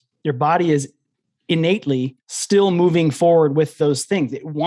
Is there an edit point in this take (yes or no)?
no